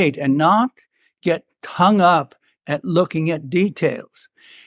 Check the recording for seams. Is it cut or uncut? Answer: uncut